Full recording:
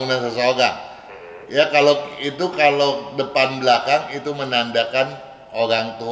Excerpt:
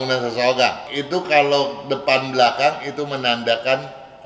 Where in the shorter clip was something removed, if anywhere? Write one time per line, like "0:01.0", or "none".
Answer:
0:00.9